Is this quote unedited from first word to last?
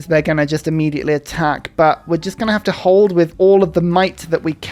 yes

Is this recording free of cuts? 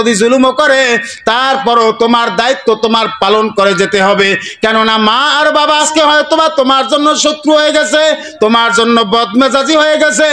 no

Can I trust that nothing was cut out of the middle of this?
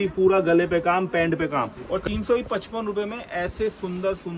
no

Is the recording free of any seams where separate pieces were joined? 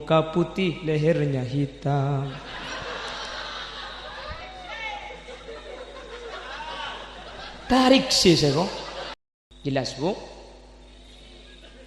no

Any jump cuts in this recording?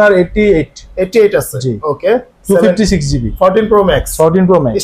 no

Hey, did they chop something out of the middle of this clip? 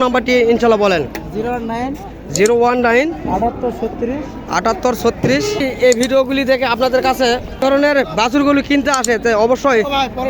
yes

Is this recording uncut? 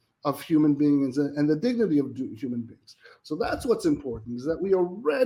yes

